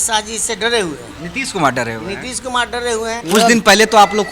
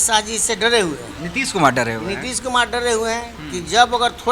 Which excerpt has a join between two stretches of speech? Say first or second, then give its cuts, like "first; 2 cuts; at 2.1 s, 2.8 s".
first; 1 cut; at 3.2 s